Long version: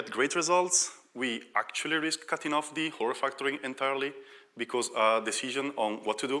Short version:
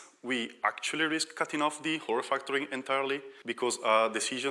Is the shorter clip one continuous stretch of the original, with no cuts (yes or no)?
no